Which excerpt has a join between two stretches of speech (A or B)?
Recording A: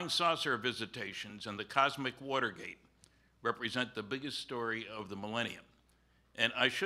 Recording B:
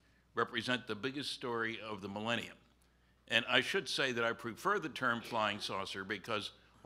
A